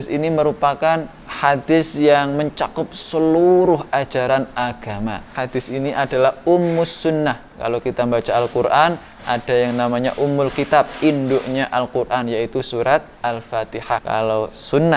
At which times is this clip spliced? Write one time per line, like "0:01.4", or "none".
0:01.2
0:05.4
0:14.0